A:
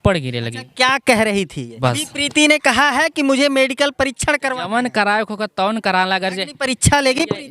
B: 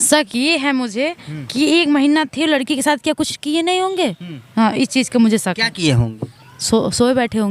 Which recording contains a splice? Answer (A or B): A